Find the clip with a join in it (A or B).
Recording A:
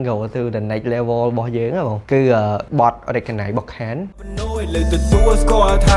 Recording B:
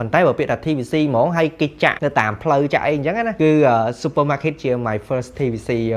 B